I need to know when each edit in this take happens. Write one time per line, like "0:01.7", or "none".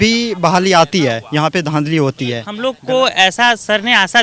0:02.5